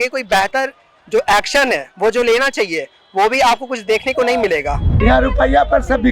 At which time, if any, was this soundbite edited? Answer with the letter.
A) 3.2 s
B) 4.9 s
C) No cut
B